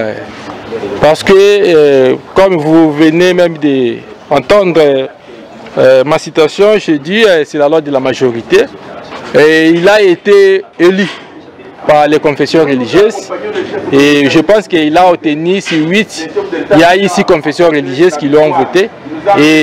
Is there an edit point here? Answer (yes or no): no